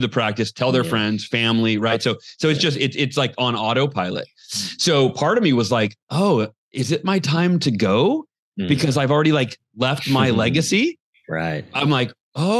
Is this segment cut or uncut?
uncut